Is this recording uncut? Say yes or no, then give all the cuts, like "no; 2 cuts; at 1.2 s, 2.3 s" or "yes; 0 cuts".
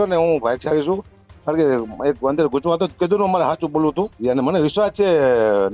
no; 1 cut; at 4.1 s